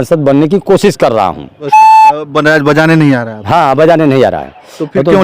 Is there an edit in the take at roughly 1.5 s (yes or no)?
yes